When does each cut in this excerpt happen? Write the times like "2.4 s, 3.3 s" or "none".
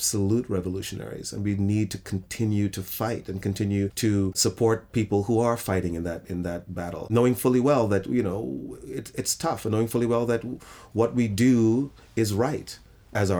4.3 s, 7.1 s